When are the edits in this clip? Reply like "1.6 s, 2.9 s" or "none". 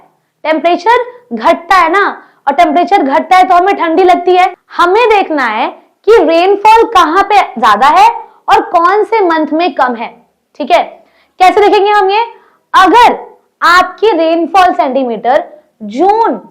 4.6 s